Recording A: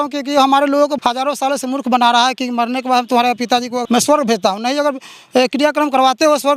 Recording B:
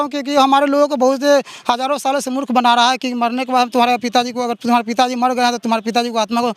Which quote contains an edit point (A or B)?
A